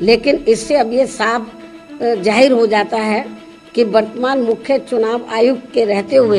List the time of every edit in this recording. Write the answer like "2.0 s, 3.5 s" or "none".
none